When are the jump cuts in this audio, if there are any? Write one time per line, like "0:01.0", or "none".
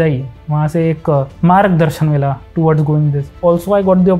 0:01.3
0:03.4